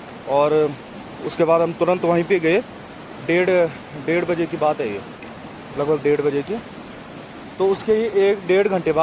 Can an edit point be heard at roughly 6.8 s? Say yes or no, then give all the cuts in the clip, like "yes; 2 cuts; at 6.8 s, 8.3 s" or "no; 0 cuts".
no; 1 cut; at 8.0 s